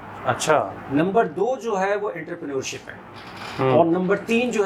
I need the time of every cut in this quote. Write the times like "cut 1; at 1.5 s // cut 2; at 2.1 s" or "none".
none